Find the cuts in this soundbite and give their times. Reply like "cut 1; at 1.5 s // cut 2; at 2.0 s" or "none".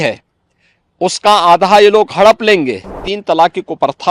cut 1; at 3.1 s

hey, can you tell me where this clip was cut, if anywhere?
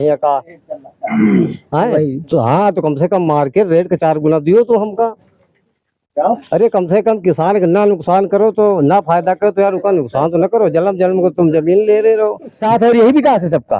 cut 1; at 12.6 s

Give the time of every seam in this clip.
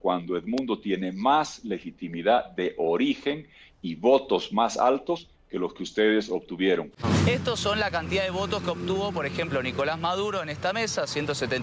cut 1; at 7.0 s

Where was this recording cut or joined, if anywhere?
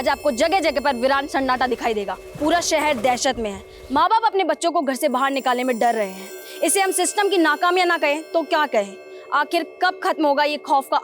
cut 1; at 2.2 s

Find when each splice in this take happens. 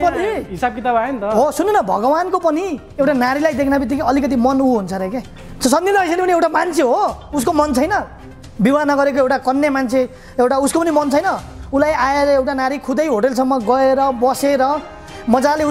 none

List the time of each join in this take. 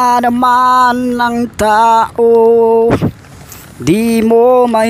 none

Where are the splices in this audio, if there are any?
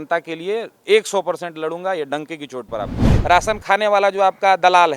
cut 1; at 3.1 s

